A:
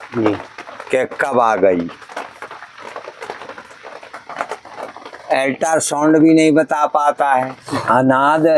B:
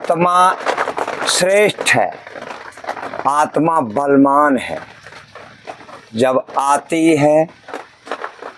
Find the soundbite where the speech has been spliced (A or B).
A